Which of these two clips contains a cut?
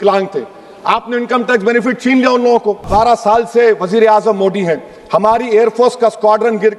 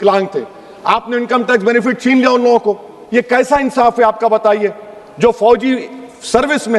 first; 1 cut; at 2.9 s

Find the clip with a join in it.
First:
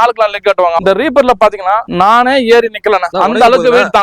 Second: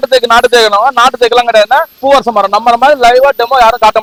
first; 3 cuts; at 0.8 s, 1.9 s, 3.1 s

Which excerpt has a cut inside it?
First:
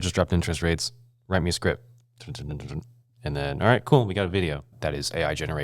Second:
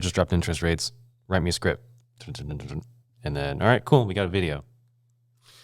first; 1 cut; at 4.7 s

